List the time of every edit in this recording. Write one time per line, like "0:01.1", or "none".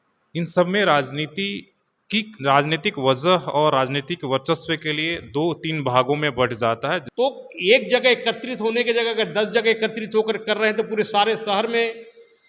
0:07.1